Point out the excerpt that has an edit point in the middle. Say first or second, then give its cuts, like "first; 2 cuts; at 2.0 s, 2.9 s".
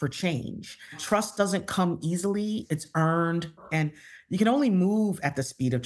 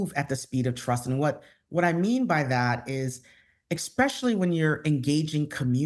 first; 3 cuts; at 1.0 s, 2.6 s, 3.6 s